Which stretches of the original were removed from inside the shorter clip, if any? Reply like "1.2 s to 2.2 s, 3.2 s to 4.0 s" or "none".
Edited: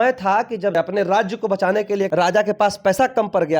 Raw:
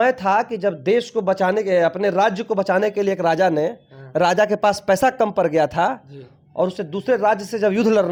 0.7 s to 1.8 s, 3.2 s to 4.1 s